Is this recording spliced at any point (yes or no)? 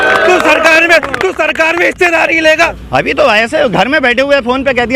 yes